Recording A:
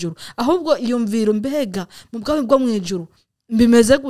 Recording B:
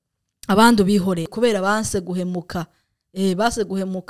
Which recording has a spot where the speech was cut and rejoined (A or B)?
B